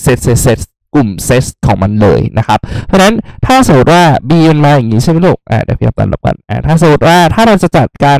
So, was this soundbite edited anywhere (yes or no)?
no